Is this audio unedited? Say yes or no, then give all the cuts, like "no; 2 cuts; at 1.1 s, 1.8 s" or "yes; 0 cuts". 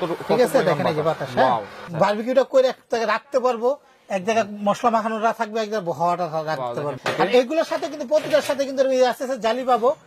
no; 2 cuts; at 1.8 s, 7.0 s